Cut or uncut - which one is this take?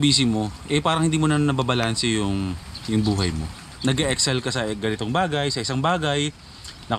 uncut